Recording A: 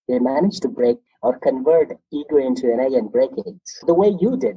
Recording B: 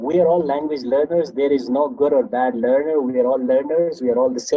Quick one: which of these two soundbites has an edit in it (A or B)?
A